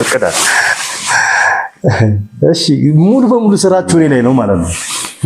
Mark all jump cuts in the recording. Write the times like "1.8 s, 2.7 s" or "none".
none